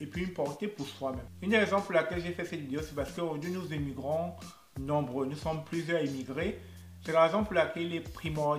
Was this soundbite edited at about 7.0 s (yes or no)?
yes